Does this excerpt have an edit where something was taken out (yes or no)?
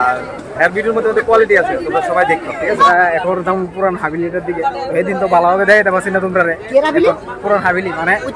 yes